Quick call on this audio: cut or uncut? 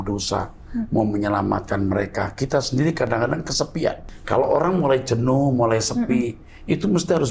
cut